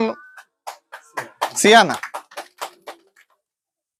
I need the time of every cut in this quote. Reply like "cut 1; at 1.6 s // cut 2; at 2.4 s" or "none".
none